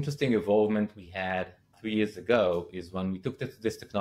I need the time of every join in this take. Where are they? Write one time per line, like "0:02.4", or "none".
none